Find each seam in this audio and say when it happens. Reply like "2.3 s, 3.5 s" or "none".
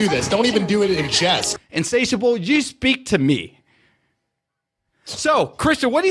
1.5 s